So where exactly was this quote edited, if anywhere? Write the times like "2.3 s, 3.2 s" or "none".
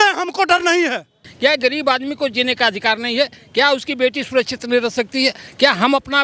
1.2 s